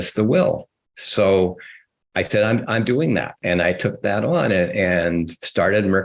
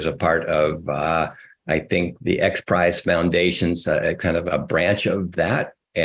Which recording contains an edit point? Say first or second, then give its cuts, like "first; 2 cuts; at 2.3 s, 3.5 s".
first; 1 cut; at 3.4 s